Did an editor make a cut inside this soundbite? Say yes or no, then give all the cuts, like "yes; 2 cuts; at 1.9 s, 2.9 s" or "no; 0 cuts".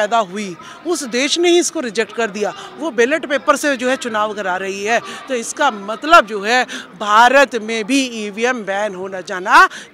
no; 0 cuts